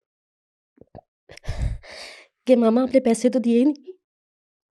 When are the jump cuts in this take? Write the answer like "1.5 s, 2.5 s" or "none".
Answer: none